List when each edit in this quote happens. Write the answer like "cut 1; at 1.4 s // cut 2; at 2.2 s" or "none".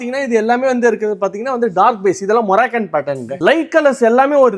cut 1; at 3.3 s